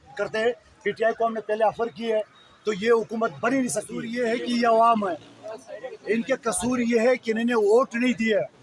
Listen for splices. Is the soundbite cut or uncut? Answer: cut